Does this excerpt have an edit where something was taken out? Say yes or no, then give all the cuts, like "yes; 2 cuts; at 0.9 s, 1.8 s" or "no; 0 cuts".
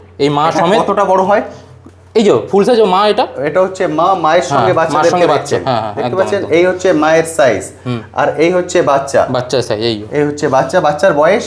no; 0 cuts